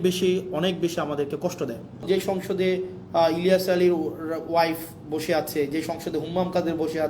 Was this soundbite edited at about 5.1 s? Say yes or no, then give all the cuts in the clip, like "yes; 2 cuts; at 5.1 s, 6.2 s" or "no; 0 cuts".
no; 1 cut; at 2.0 s